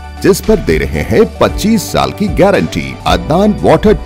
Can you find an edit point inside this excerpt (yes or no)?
yes